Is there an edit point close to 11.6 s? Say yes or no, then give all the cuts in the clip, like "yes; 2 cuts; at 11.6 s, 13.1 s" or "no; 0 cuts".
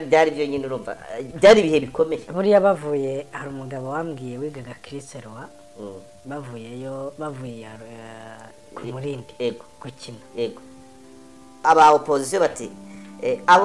yes; 1 cut; at 11.6 s